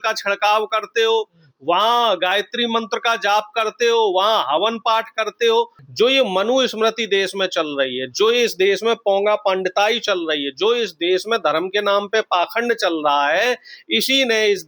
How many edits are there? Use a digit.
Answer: 1